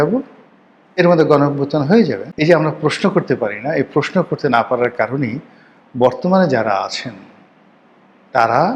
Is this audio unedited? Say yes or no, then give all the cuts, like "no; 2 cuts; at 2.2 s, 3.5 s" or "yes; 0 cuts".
no; 1 cut; at 2.3 s